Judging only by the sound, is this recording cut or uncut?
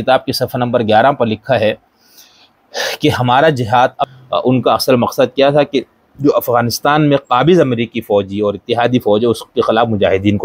cut